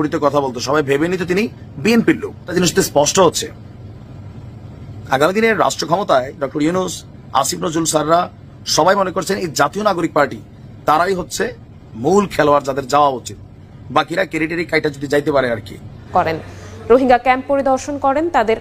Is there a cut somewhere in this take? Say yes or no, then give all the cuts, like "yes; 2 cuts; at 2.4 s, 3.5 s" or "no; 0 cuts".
yes; 2 cuts; at 2.5 s, 16.0 s